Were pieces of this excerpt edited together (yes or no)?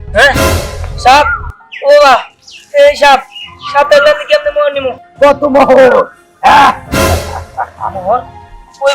yes